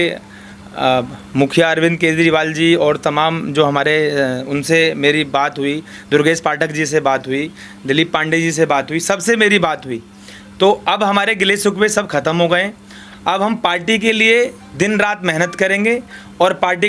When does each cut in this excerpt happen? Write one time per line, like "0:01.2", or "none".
none